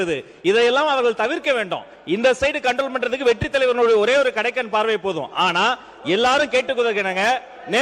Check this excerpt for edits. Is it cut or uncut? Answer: uncut